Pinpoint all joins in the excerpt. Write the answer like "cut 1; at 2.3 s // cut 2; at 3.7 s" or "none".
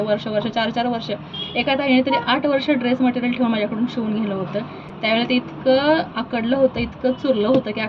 none

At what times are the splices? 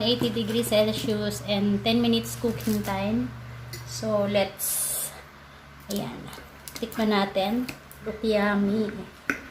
cut 1; at 8.1 s

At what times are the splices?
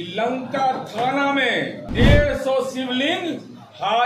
cut 1; at 1.8 s

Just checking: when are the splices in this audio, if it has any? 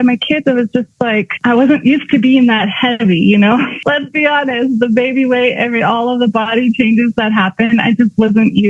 cut 1; at 1.3 s // cut 2; at 3.8 s

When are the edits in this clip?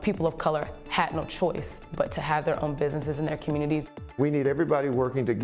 cut 1; at 4.1 s

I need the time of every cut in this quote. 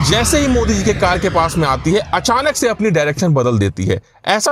none

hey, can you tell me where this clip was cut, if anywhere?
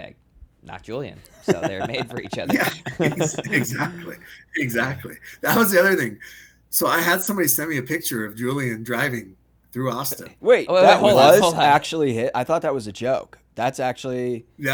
none

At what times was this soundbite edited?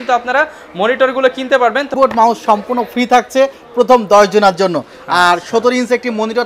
cut 1; at 1.9 s

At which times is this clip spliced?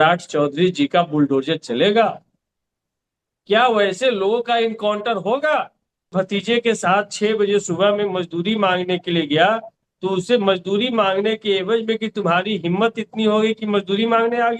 cut 1; at 6.1 s

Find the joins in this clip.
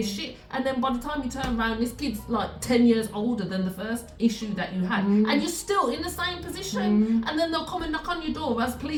none

